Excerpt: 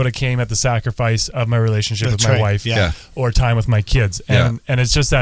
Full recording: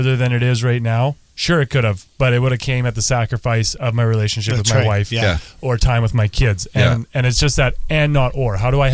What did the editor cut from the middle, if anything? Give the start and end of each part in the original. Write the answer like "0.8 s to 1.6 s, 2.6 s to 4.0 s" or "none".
none